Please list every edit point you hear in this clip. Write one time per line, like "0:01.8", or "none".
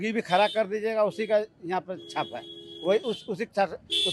none